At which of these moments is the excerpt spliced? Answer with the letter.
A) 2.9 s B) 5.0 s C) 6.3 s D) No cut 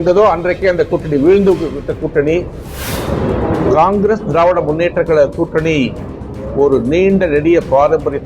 A